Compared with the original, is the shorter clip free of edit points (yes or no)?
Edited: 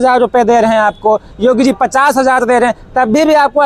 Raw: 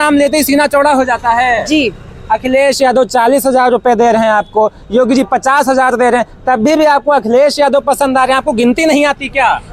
yes